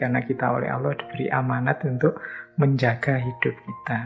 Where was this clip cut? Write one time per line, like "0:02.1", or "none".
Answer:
none